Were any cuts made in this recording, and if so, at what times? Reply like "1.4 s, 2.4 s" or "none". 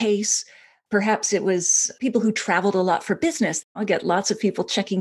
3.6 s